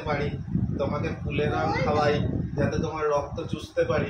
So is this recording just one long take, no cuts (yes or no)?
yes